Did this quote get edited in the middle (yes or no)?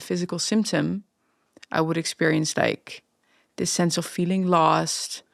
no